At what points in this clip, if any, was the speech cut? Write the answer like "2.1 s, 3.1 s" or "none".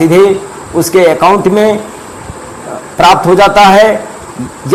none